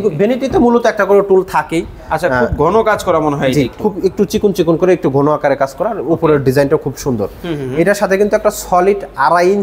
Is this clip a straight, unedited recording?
yes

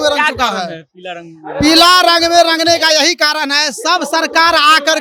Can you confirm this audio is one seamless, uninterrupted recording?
yes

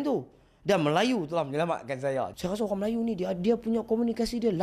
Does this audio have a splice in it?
yes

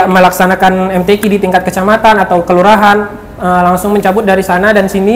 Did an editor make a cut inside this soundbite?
no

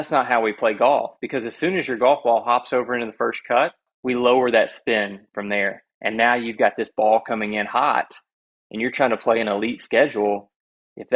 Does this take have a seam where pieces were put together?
yes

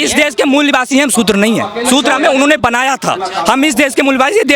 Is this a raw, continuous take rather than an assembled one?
yes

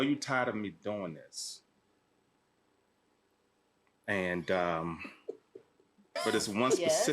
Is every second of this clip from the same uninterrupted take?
no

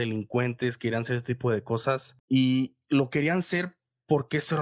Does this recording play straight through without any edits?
no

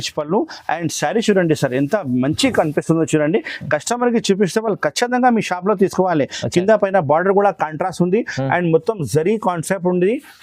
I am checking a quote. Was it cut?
no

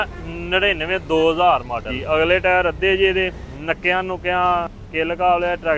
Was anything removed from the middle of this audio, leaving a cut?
yes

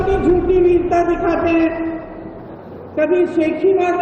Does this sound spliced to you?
no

